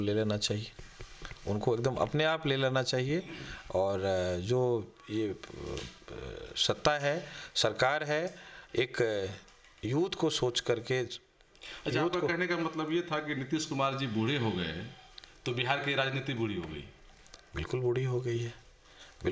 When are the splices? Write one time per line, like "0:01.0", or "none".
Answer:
none